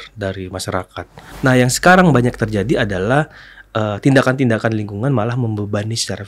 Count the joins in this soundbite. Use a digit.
1